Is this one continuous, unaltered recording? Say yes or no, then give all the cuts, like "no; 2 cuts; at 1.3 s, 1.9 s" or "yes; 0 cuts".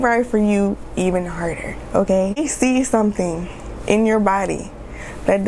no; 1 cut; at 2.4 s